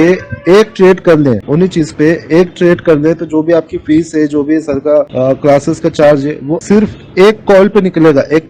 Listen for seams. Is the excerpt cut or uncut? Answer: uncut